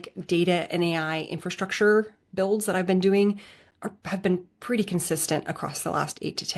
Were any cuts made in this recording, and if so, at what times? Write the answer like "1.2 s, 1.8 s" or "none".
none